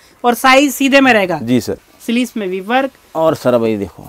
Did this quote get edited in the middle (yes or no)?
yes